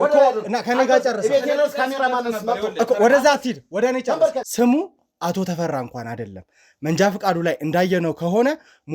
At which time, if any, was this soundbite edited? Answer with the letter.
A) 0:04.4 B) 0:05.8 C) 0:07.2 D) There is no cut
A